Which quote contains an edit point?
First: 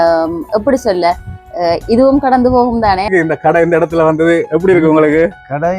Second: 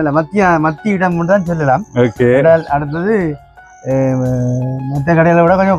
first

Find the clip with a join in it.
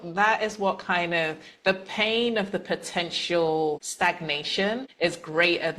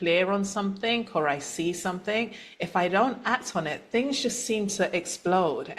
first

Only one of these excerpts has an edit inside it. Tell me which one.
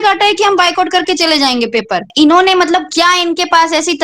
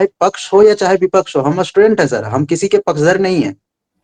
first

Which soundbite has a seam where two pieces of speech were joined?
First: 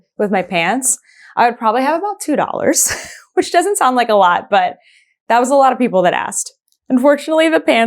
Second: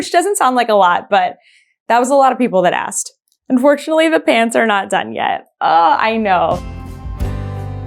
second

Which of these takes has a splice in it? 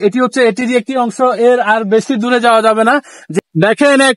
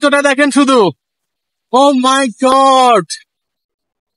first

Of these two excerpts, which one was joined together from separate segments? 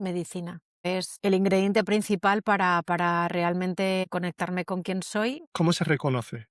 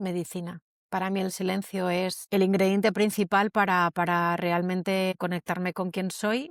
first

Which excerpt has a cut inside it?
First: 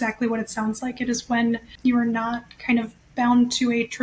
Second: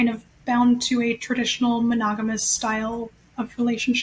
first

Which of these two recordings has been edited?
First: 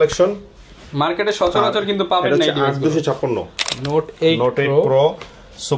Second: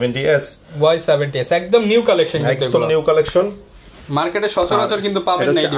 first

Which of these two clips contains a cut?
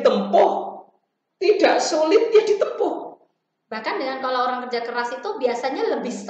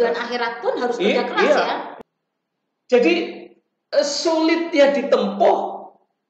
second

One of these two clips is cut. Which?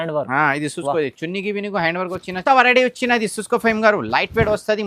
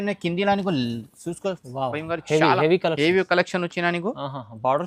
first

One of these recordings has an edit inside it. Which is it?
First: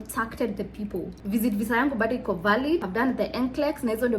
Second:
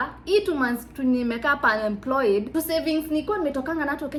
first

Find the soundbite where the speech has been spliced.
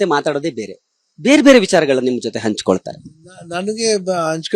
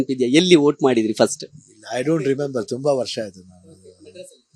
first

